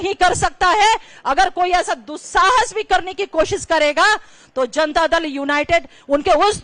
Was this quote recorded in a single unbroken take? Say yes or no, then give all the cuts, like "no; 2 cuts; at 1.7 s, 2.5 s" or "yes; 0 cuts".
yes; 0 cuts